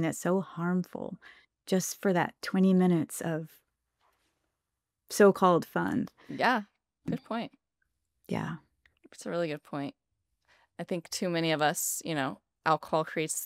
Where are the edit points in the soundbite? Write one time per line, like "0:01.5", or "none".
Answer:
none